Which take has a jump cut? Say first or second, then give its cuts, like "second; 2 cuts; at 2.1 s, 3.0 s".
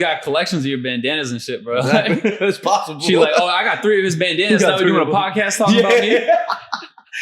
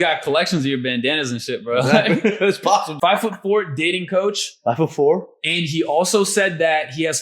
second; 1 cut; at 2.9 s